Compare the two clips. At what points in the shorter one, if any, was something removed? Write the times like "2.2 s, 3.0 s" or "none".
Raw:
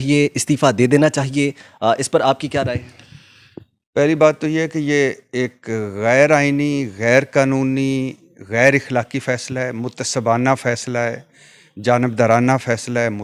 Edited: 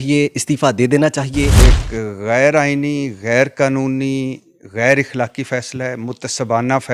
1.5 s